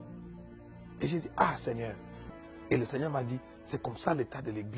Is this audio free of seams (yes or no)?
no